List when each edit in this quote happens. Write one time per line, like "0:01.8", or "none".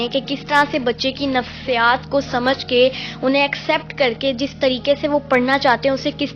none